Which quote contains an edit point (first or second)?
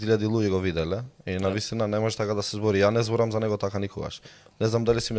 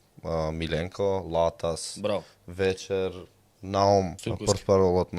second